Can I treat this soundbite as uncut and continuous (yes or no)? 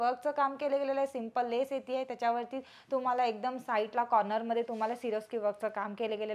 yes